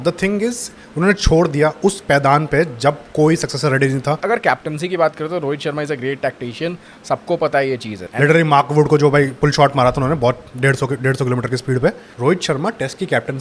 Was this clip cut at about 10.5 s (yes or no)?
no